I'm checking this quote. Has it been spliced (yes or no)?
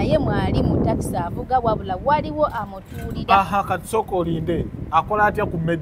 no